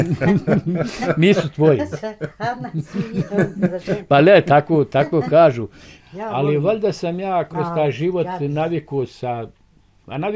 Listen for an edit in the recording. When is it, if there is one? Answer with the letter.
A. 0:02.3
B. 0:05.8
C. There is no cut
B